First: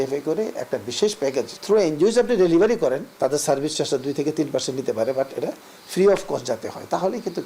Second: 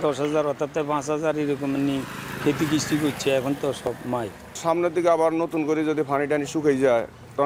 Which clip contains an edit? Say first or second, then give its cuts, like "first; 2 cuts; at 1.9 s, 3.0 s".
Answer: first; 2 cuts; at 1.5 s, 3.1 s